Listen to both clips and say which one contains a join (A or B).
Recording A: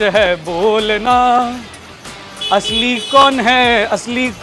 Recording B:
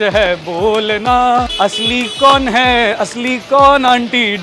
B